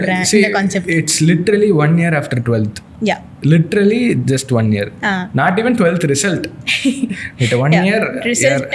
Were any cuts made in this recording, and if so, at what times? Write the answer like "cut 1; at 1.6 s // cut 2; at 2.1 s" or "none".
none